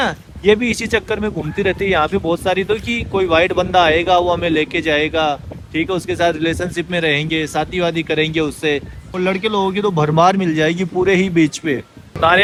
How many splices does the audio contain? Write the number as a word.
zero